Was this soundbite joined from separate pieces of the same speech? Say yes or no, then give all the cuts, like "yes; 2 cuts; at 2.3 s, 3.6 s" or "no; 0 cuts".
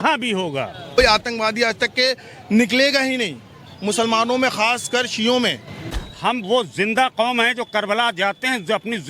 yes; 2 cuts; at 1.0 s, 5.8 s